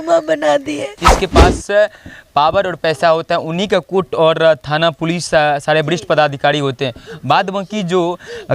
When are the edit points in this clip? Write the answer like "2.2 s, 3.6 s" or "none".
1.0 s